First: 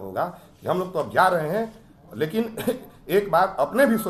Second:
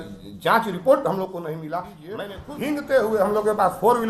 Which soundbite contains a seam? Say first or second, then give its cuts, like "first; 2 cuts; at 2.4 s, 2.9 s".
second; 1 cut; at 2.2 s